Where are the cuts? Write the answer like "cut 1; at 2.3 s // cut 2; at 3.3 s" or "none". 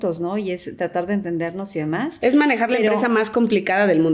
none